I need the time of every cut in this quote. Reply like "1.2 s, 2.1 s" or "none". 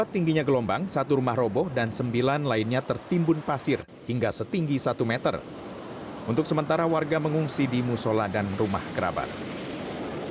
7.0 s